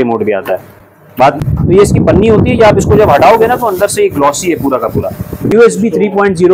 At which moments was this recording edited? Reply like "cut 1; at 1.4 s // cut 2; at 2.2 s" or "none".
cut 1; at 1.4 s // cut 2; at 5.5 s